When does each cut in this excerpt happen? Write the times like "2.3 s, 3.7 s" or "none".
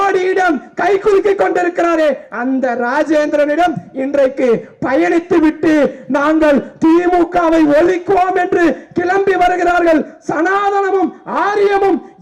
none